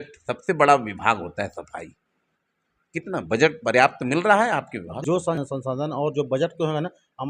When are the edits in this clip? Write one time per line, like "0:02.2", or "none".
0:05.2